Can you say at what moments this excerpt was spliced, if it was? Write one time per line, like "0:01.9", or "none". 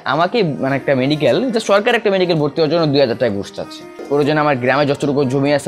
0:03.9